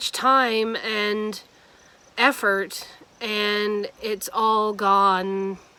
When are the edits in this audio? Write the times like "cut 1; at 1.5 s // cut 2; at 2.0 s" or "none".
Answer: none